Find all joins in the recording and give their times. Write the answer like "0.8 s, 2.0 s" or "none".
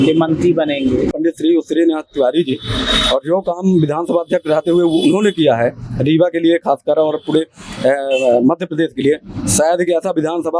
1.1 s